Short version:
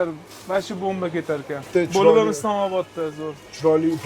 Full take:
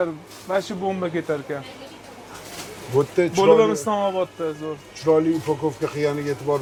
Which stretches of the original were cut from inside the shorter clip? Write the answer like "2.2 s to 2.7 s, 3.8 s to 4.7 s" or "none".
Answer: 1.7 s to 3.1 s